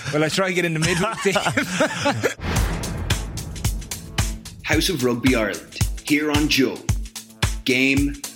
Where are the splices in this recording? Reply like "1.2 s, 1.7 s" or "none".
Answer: 2.4 s